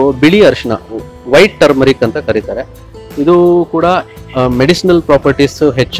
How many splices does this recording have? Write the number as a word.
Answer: zero